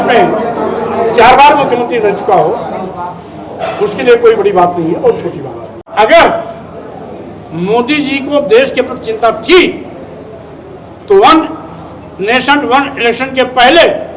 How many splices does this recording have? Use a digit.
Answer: 1